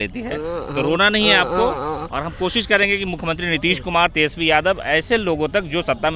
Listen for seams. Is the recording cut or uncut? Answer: uncut